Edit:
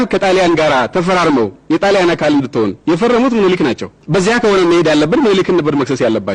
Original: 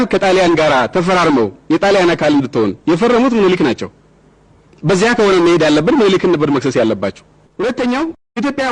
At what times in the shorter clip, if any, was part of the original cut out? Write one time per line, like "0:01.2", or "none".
0:03.9